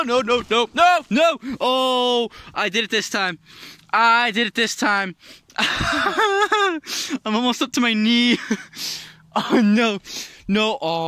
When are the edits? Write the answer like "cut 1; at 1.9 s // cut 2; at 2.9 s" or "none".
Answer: none